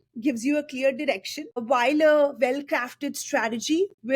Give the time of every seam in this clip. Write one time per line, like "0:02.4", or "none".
0:01.6